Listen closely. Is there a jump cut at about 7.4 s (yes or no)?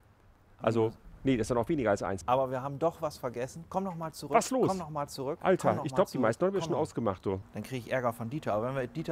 yes